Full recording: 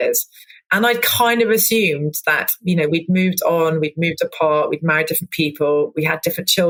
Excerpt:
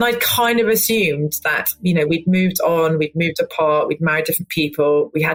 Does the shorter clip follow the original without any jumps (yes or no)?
yes